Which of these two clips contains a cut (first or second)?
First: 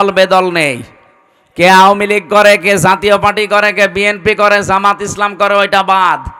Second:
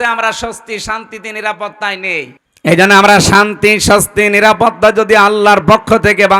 second